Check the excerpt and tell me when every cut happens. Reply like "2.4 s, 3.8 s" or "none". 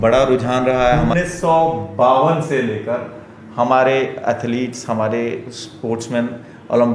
1.1 s